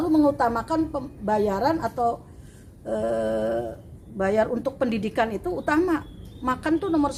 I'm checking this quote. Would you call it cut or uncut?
uncut